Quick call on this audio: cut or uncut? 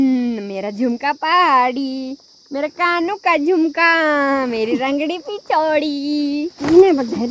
uncut